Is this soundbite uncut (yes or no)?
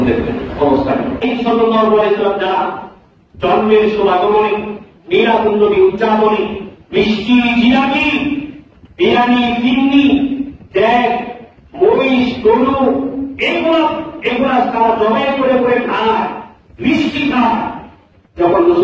no